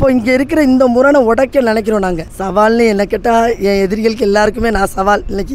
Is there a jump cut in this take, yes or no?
yes